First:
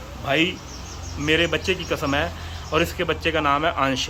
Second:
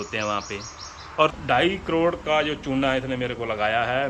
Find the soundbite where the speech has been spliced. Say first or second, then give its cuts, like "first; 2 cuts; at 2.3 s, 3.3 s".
second; 1 cut; at 1.3 s